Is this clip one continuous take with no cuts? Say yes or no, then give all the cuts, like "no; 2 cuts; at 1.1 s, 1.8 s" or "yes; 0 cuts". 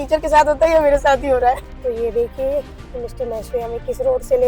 no; 1 cut; at 1.8 s